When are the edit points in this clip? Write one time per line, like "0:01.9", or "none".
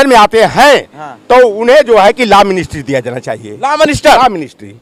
none